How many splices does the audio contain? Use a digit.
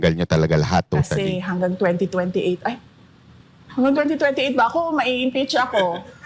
1